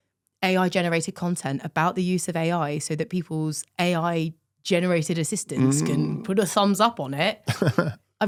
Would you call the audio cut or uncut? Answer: uncut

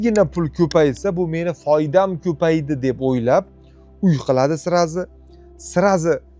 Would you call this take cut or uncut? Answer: uncut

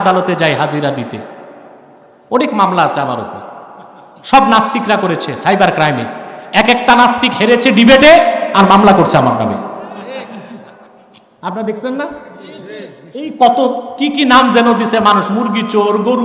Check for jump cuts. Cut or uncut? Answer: uncut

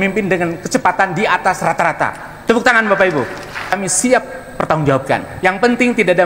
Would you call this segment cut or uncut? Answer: cut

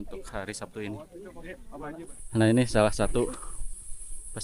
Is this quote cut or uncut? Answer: cut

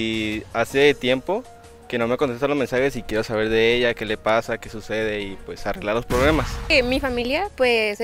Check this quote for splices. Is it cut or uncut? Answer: cut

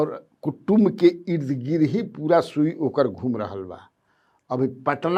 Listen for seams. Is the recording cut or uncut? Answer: uncut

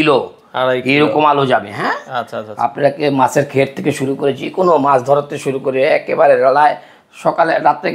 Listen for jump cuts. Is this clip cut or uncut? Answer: uncut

